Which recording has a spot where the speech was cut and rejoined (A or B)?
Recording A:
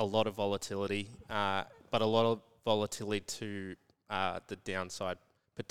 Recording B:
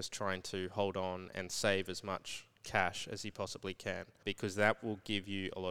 B